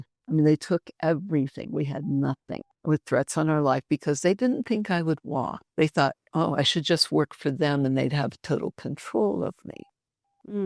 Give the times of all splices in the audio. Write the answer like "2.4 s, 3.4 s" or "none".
2.7 s, 5.6 s